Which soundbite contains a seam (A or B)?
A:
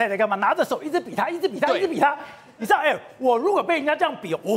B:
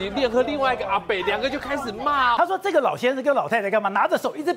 B